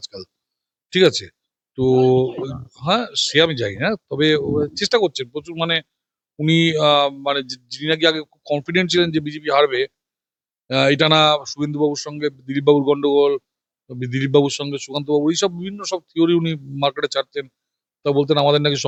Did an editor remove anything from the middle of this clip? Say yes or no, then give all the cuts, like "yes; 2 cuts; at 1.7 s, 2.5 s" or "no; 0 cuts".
no; 0 cuts